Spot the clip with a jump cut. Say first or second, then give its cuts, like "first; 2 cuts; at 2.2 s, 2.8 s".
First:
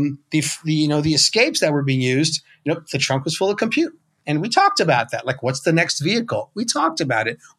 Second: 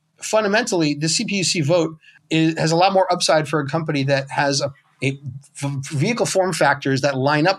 second; 2 cuts; at 2.1 s, 4.9 s